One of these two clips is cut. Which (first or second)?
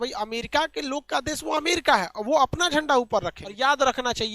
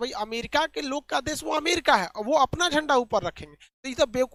first